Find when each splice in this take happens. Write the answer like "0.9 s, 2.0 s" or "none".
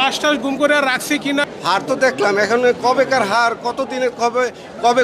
1.5 s